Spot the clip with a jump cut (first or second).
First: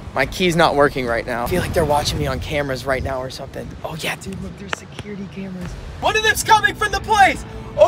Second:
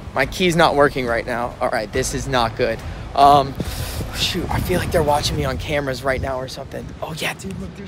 first